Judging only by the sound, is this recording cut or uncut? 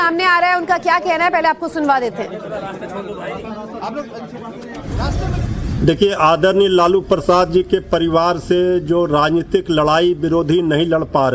cut